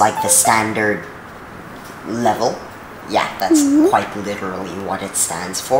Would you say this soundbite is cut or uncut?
uncut